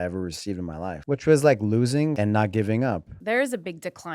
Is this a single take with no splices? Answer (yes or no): no